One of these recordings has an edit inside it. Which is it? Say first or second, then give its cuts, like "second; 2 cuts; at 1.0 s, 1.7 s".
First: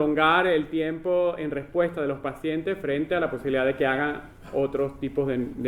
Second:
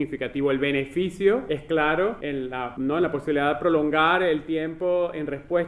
second; 2 cuts; at 1.4 s, 2.5 s